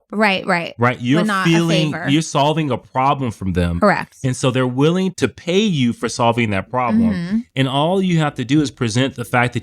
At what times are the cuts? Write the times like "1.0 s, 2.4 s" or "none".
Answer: 5.1 s